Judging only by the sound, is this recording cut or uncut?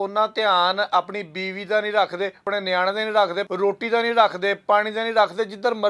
cut